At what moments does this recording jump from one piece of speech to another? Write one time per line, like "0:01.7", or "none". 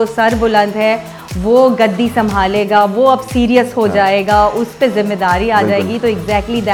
none